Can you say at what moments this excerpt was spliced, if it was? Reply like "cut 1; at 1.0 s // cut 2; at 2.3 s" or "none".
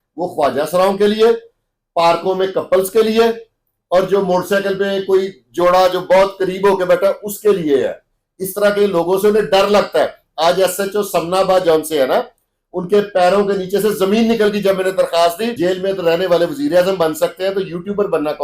cut 1; at 15.5 s